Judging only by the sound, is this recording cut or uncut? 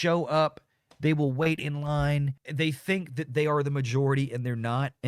cut